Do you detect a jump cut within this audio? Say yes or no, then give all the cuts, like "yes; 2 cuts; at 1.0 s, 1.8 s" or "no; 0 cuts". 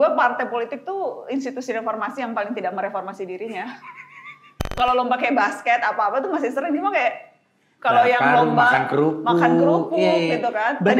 yes; 1 cut; at 4.7 s